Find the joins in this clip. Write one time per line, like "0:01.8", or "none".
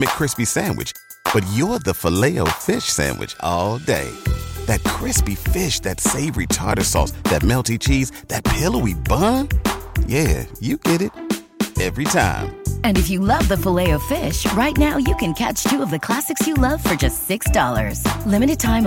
none